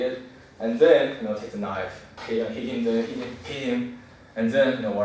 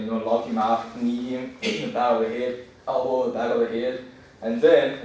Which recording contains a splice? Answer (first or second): first